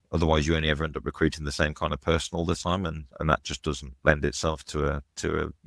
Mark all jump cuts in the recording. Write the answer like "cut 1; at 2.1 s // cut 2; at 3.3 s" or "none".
none